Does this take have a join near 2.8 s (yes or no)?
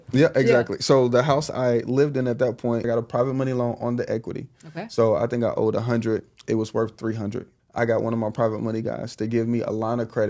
yes